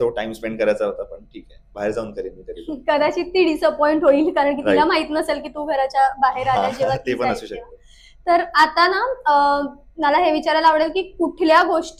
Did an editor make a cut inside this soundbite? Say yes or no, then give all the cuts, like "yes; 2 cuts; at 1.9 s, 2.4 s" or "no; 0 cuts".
no; 0 cuts